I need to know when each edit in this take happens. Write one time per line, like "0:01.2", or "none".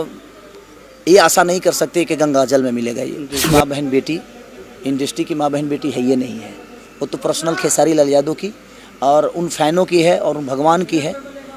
0:03.5